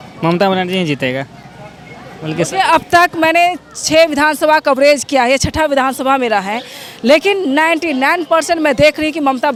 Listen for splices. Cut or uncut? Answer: uncut